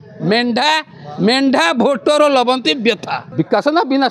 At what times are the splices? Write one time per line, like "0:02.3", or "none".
0:03.2